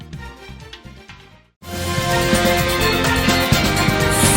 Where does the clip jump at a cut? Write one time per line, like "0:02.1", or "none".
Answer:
0:02.9